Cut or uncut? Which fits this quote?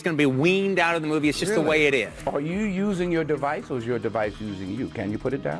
cut